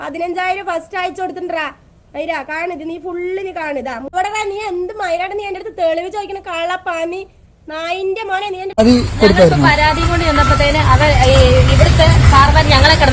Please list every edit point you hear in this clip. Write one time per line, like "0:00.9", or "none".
0:04.1
0:08.7